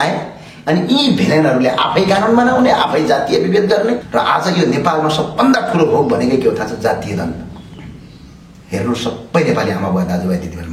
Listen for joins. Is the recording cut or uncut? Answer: cut